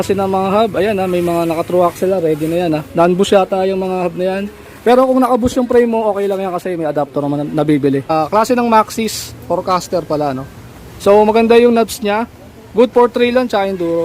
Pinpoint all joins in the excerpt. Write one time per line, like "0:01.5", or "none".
0:08.1